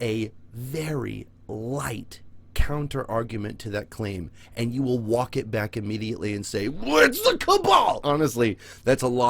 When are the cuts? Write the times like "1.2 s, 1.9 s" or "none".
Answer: 8.0 s